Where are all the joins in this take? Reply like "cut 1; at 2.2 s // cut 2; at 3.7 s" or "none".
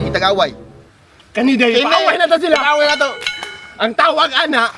none